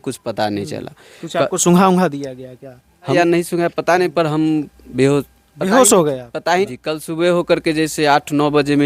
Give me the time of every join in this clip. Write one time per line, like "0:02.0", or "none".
0:03.1
0:06.7